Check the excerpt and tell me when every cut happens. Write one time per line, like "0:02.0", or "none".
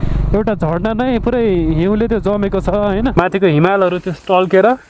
0:03.1